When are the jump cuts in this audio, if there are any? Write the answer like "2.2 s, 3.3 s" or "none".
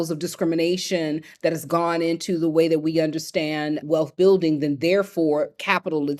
none